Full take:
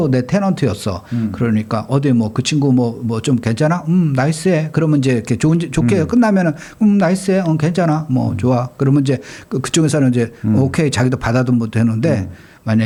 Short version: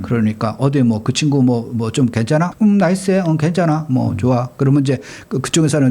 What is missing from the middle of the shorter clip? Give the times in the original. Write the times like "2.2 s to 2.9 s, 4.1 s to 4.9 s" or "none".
3.8 s to 6.7 s